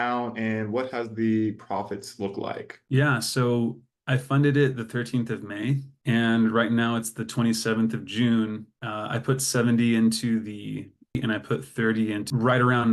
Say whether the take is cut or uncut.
uncut